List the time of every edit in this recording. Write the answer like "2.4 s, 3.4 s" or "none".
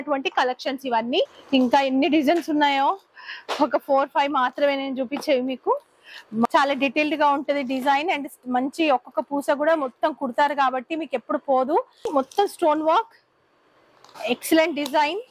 1.4 s, 6.5 s, 12.1 s